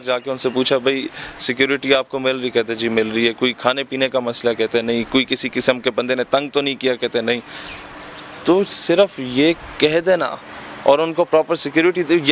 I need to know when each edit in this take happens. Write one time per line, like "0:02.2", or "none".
none